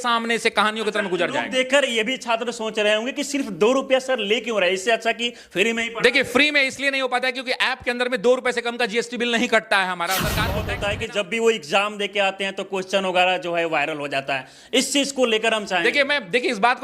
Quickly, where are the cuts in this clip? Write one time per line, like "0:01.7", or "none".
0:10.7